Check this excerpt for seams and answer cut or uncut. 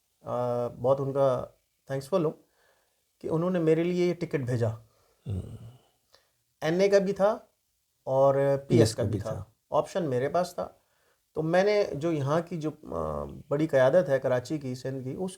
uncut